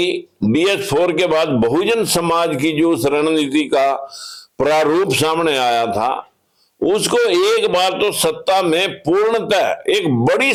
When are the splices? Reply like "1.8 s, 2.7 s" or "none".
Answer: none